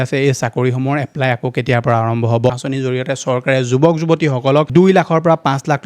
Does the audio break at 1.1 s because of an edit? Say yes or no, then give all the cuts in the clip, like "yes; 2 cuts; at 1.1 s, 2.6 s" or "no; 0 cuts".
no; 2 cuts; at 2.6 s, 4.7 s